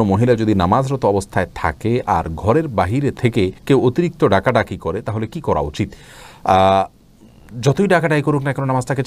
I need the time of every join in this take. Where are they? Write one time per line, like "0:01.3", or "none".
none